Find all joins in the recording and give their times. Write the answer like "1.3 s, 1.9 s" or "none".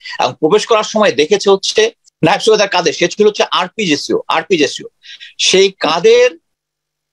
2.0 s